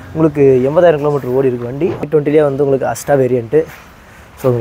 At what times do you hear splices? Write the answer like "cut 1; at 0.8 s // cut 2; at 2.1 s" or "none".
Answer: cut 1; at 2.0 s